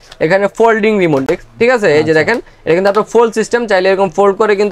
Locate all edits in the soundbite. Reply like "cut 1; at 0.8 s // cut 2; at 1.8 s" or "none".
none